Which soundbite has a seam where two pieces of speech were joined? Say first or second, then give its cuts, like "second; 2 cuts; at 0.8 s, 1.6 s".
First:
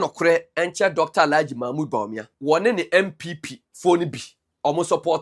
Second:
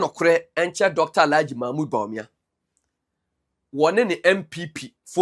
first; 1 cut; at 2.2 s